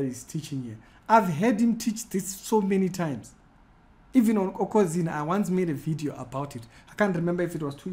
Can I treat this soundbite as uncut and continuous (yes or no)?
yes